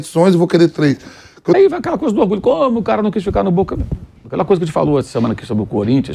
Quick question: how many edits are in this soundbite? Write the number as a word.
one